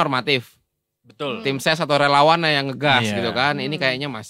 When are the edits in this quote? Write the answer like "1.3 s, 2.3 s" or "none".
none